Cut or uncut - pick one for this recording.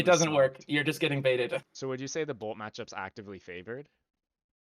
cut